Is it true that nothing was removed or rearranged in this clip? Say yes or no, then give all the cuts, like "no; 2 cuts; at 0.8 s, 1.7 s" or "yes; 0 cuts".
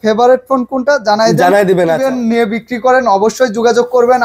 no; 1 cut; at 2.0 s